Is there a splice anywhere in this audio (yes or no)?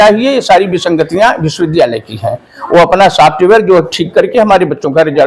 no